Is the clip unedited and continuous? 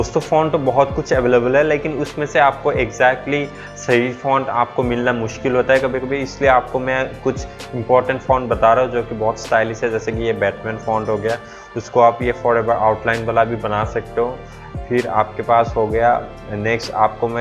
yes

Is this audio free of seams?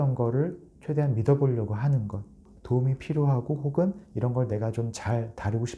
no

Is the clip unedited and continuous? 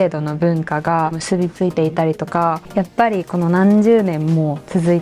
no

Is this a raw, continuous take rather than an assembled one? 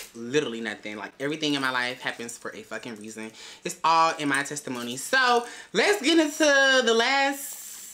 yes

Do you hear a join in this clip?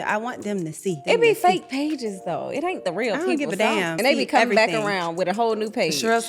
yes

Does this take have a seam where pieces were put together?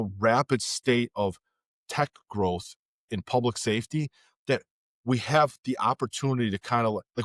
no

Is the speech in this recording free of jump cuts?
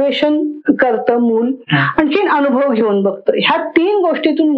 yes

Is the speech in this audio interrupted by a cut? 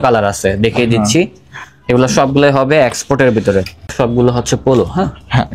yes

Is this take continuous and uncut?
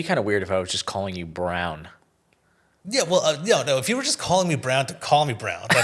yes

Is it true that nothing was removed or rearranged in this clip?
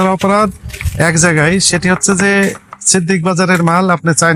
yes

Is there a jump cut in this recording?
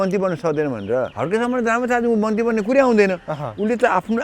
yes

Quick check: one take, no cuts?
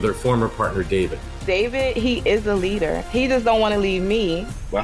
yes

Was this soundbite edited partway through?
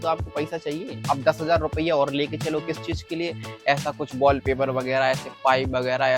yes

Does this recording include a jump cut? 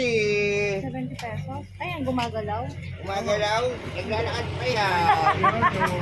no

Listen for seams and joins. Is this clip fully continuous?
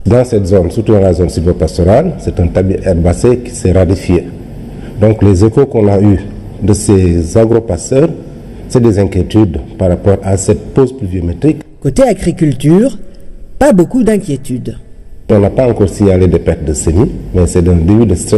no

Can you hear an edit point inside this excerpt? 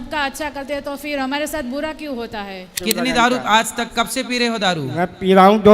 yes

